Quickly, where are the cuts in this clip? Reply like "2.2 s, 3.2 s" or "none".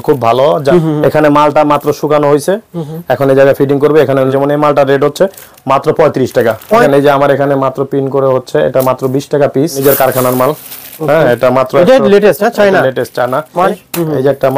0.7 s, 4.3 s, 6.8 s, 9.8 s, 13.7 s